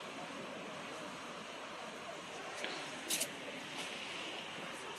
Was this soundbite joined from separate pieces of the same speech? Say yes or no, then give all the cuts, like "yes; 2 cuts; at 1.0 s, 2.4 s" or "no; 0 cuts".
no; 0 cuts